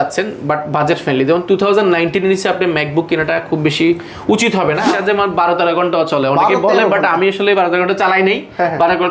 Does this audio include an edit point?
yes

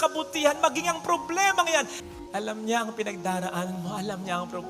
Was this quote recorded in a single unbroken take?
no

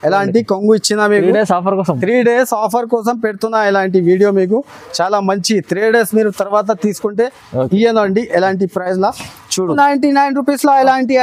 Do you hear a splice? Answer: yes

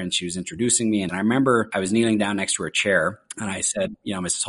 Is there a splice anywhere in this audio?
yes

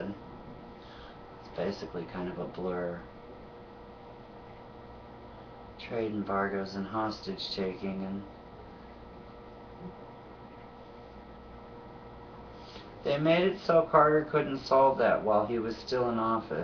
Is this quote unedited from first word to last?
yes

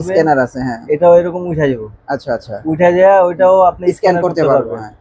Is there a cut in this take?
no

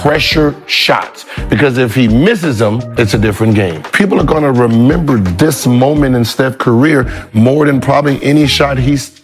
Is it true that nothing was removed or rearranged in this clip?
no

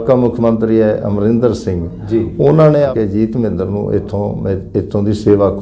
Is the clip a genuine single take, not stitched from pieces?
no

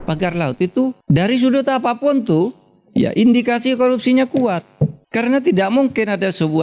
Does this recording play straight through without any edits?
no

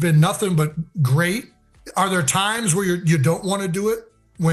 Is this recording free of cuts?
yes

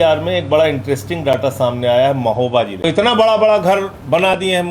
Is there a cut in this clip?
yes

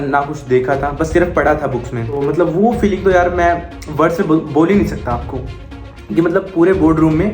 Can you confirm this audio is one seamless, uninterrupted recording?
no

